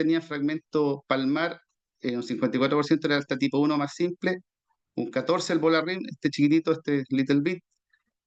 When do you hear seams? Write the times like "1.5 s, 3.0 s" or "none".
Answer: none